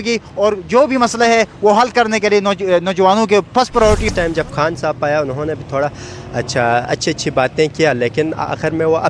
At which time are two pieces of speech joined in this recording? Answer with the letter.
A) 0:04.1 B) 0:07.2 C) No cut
A